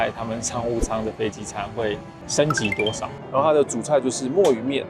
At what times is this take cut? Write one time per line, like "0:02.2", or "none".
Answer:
0:03.1